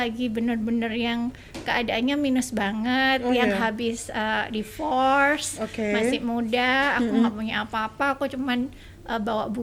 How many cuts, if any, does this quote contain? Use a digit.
0